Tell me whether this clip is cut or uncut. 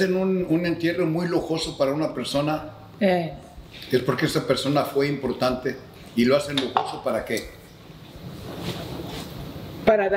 cut